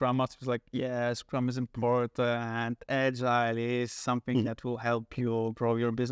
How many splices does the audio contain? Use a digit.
0